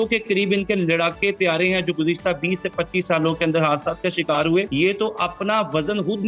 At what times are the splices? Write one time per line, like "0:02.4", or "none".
0:04.7